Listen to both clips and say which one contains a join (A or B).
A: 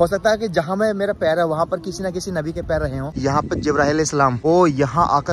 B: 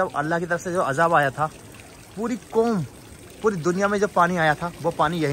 A